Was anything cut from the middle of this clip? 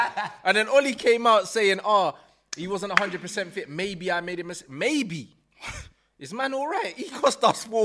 no; 0 cuts

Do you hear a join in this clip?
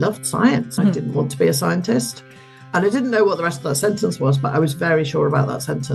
no; 0 cuts

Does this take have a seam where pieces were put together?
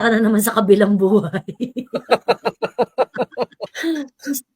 yes; 1 cut; at 3.7 s

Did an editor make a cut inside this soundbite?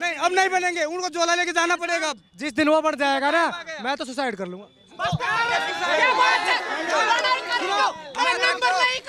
no; 0 cuts

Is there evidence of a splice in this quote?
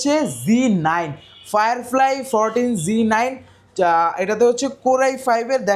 no; 0 cuts

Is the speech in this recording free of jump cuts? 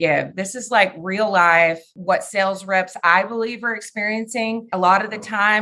no; 2 cuts; at 1.9 s, 4.7 s

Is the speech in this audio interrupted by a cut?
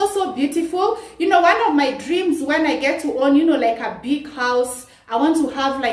no; 0 cuts

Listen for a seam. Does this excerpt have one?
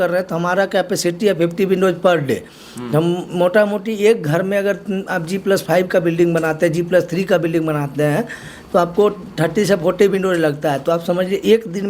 no; 0 cuts

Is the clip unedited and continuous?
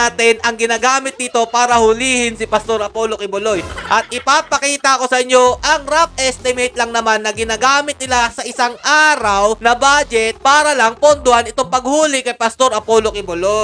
yes; 0 cuts

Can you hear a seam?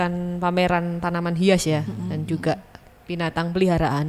no; 0 cuts

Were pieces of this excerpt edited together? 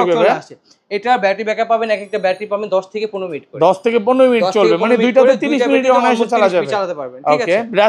no; 0 cuts

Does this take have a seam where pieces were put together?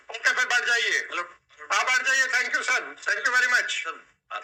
no; 0 cuts

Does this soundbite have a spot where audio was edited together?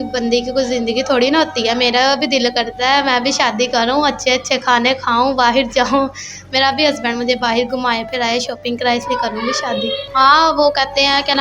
yes; 1 cut; at 10.0 s

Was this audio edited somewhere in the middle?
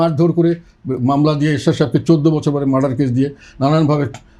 no; 0 cuts

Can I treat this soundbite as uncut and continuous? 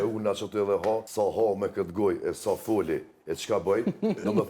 no; 1 cut; at 1.1 s

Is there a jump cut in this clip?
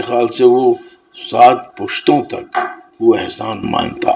yes; 1 cut; at 2.8 s

